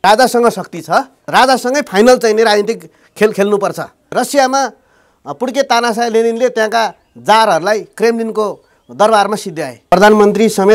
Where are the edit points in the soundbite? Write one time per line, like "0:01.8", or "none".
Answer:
0:01.2
0:04.1
0:09.8